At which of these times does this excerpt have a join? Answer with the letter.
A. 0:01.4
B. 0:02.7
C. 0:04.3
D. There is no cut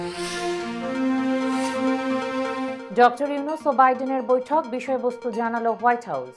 B